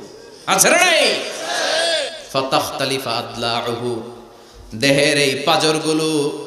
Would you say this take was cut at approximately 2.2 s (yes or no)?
yes